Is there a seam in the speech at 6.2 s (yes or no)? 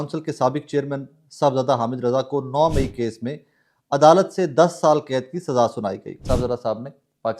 yes